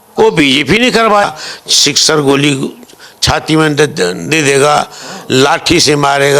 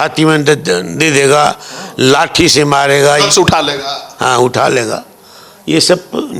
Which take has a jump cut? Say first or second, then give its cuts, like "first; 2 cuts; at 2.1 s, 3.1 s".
first; 1 cut; at 1.2 s